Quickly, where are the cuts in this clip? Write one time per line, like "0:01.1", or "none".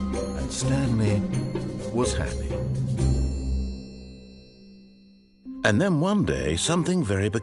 0:05.6